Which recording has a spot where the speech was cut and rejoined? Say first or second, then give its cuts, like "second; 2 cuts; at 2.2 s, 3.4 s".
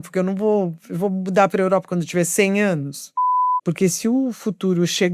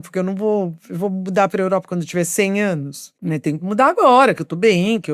first; 1 cut; at 3.4 s